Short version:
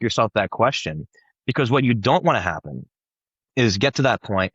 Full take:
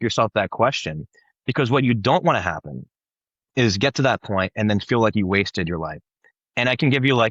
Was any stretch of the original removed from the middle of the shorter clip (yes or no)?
no